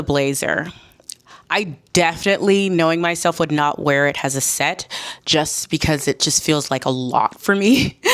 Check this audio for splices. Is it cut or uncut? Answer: uncut